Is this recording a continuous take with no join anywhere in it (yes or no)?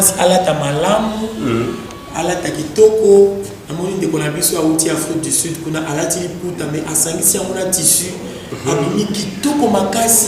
yes